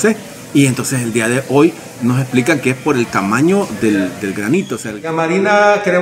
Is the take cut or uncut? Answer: cut